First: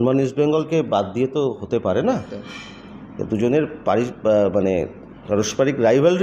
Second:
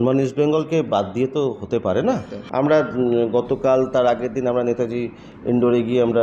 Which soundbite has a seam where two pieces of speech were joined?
second; 1 cut; at 2.4 s

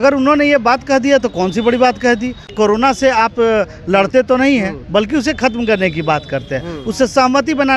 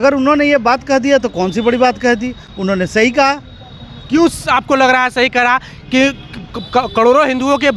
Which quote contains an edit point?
first; 1 cut; at 2.5 s

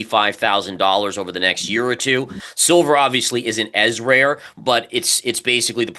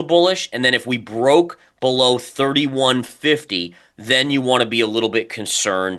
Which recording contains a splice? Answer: first; 1 cut; at 2.4 s

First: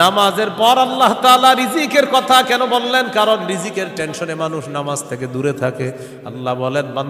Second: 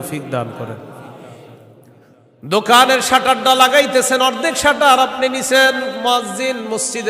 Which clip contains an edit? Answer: second; 1 cut; at 2.2 s

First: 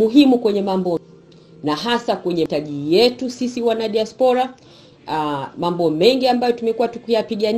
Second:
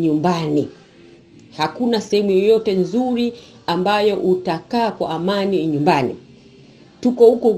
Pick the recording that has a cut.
first; 2 cuts; at 1.0 s, 2.5 s

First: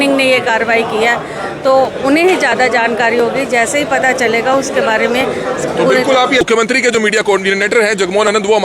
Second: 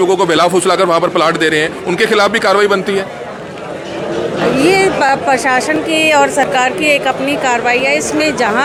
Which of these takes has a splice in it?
first; 1 cut; at 6.5 s

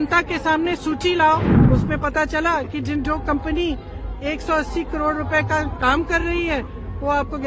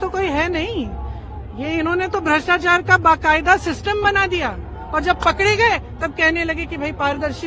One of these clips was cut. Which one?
first; 1 cut; at 1.5 s

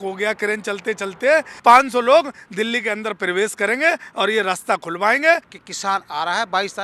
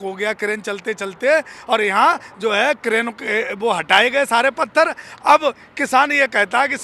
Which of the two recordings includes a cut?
first; 2 cuts; at 1.5 s, 5.5 s

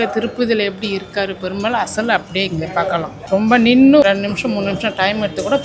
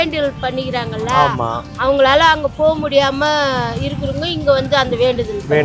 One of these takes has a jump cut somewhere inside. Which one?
first; 2 cuts; at 3.2 s, 4.0 s

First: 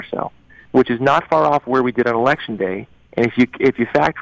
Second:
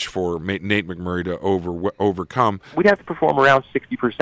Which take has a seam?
second; 1 cut; at 2.7 s

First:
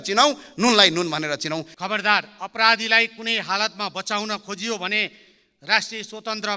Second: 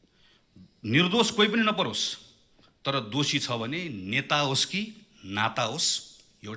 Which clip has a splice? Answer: first; 1 cut; at 1.7 s

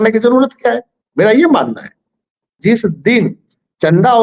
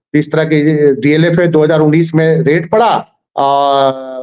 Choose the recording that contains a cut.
first; 1 cut; at 2.6 s

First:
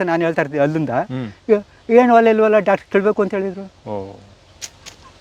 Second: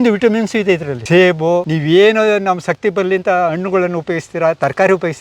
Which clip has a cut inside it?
second; 2 cuts; at 0.9 s, 1.7 s

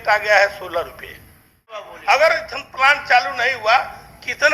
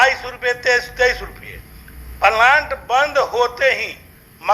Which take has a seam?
first; 1 cut; at 1.8 s

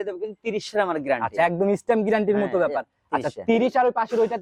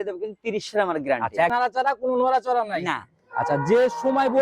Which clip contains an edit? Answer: second; 1 cut; at 1.5 s

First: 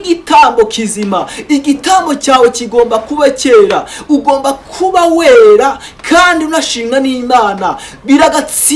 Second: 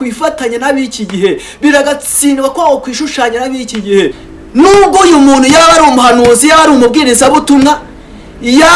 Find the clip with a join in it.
second; 1 cut; at 4.2 s

